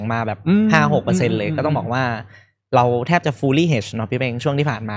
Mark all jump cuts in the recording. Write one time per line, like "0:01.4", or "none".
none